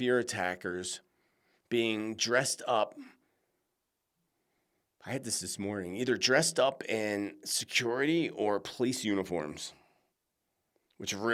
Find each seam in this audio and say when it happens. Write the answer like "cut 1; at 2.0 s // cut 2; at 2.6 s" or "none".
none